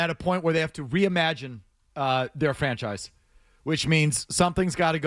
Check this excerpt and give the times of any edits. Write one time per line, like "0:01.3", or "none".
none